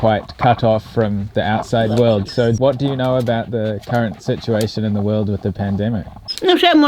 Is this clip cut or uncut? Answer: uncut